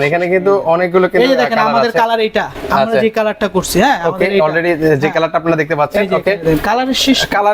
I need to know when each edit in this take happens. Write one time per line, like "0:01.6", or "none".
none